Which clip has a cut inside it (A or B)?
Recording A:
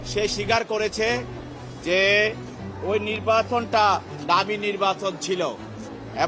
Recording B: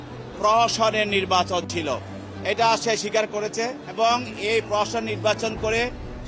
B